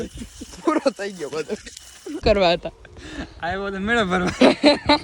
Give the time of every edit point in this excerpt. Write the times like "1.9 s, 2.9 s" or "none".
2.2 s